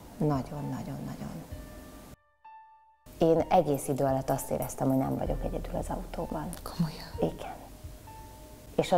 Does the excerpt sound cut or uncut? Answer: cut